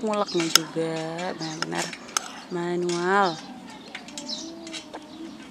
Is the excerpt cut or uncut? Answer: uncut